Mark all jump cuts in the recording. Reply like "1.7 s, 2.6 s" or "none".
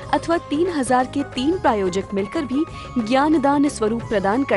none

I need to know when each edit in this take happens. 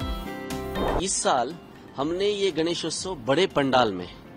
0.9 s

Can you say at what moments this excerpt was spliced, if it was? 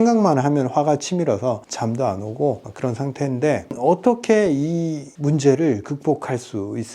1.7 s, 3.7 s

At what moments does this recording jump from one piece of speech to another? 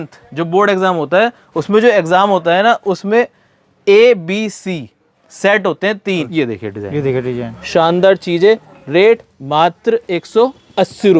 6.3 s

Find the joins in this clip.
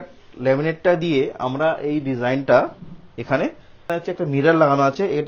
3.9 s

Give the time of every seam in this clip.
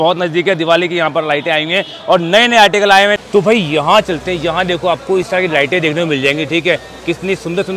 3.2 s

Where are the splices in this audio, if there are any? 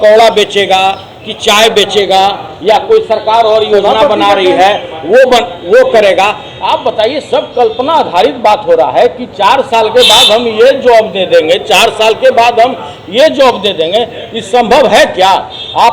none

